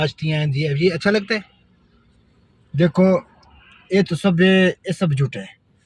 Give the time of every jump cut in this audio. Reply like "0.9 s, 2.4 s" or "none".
none